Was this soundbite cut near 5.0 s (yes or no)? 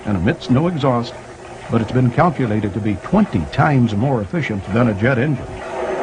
no